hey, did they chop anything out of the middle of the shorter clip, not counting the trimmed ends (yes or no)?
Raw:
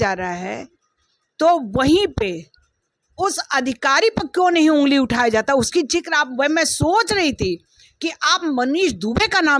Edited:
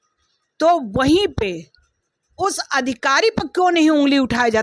no